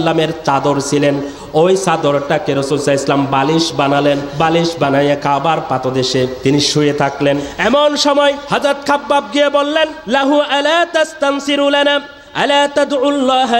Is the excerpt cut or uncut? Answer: cut